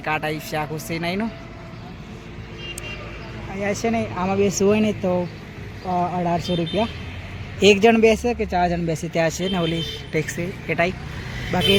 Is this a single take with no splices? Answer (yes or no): yes